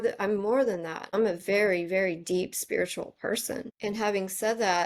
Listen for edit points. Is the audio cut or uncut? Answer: cut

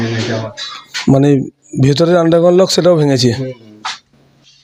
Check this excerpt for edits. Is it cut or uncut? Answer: uncut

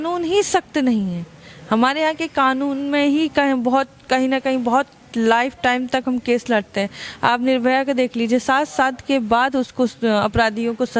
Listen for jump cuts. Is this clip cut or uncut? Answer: uncut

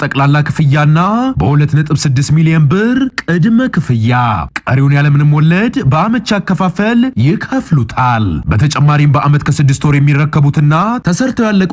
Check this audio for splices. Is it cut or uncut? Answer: uncut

